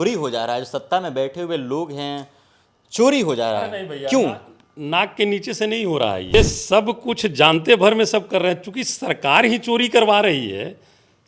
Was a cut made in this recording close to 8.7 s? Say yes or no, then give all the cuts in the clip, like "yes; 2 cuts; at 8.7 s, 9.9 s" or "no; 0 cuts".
no; 1 cut; at 6.3 s